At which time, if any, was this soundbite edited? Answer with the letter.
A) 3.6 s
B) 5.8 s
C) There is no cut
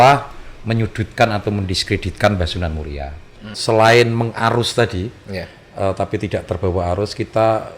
A